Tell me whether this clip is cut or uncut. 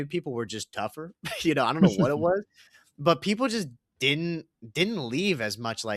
uncut